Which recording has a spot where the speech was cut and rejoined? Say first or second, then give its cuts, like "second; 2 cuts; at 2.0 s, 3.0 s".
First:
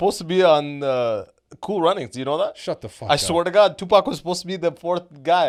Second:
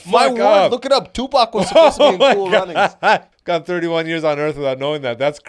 second; 1 cut; at 3.3 s